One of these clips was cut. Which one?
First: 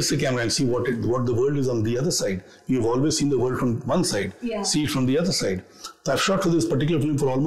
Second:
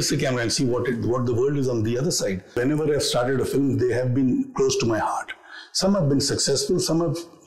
second; 1 cut; at 2.6 s

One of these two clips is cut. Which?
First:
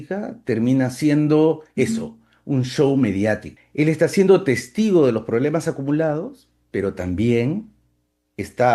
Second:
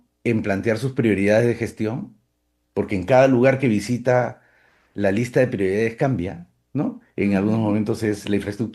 first; 1 cut; at 3.6 s

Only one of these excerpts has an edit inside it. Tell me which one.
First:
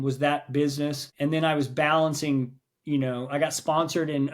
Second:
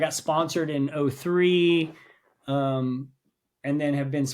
first; 1 cut; at 1.0 s

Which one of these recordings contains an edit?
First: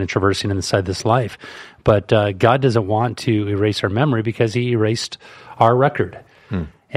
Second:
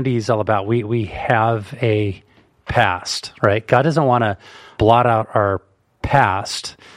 second; 1 cut; at 4.7 s

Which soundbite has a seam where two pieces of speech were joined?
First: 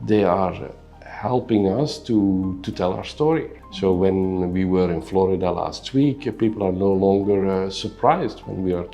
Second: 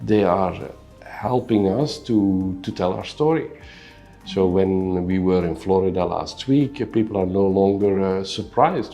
first; 1 cut; at 3.6 s

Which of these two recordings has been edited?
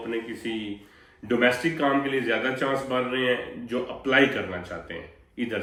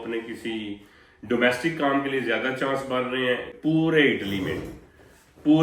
second; 1 cut; at 3.5 s

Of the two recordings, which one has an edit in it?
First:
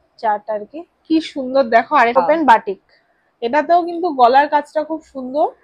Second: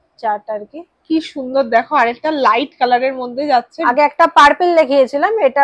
first; 1 cut; at 2.2 s

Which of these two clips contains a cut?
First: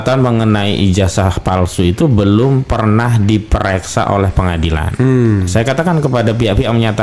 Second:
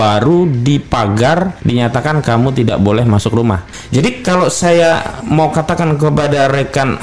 second; 2 cuts; at 1.6 s, 3.7 s

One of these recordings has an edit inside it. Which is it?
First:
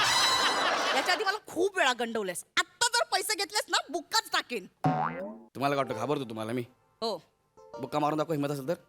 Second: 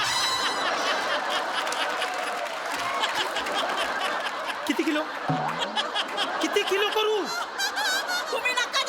first; 1 cut; at 0.9 s

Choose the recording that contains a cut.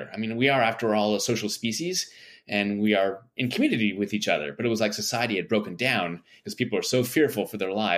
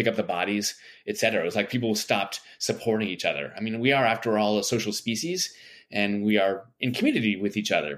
first; 1 cut; at 6.4 s

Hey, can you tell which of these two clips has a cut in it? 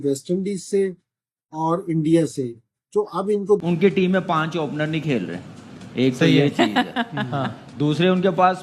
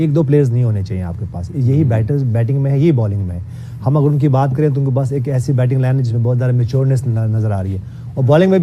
first; 1 cut; at 3.6 s

